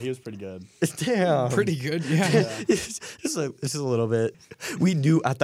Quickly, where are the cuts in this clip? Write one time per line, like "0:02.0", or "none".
0:04.4